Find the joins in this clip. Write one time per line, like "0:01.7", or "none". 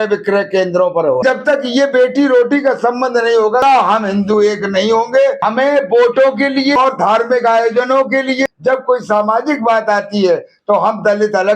0:01.2
0:03.6
0:05.4
0:06.8
0:08.5